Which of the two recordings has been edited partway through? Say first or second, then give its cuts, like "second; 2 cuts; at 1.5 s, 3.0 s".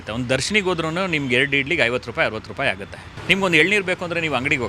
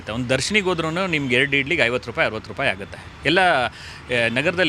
first; 1 cut; at 3.1 s